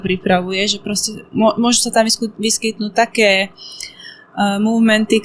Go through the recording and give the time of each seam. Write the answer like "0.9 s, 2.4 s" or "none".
none